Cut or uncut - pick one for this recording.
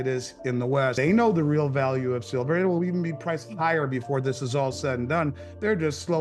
cut